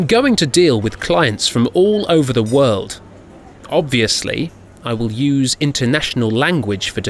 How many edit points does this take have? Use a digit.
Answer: 1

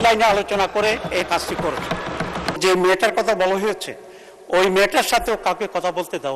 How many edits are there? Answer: 1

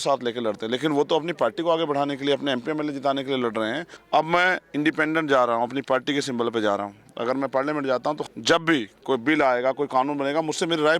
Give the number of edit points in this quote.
2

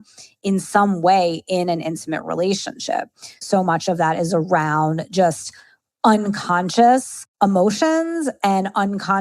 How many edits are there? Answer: 2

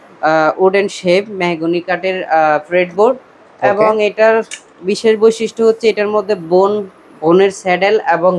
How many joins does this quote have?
0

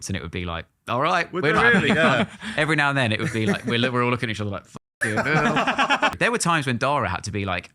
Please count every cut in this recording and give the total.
1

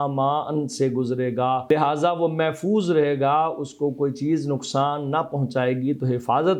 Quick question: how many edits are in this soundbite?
1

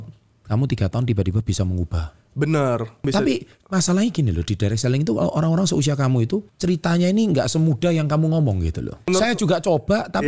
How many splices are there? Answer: 3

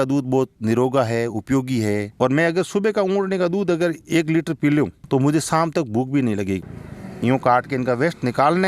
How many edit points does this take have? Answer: 2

